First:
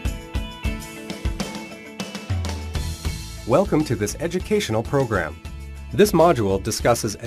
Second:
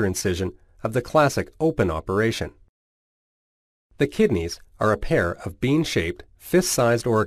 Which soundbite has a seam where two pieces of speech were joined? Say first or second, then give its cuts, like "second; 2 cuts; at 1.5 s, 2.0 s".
second; 1 cut; at 1.1 s